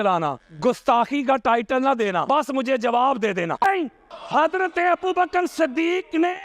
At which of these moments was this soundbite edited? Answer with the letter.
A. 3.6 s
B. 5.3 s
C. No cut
A